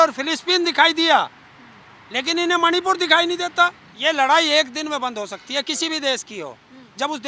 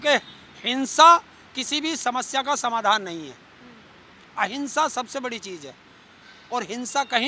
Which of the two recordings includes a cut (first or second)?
first